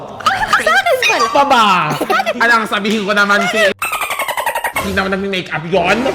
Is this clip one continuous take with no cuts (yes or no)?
yes